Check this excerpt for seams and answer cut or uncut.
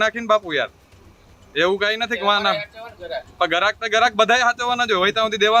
uncut